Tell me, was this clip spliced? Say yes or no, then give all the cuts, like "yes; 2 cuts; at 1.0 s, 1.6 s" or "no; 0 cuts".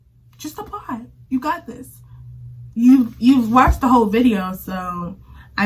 no; 0 cuts